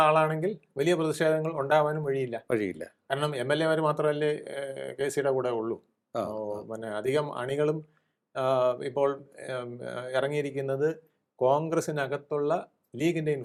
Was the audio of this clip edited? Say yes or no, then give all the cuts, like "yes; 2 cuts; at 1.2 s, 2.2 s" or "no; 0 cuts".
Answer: no; 0 cuts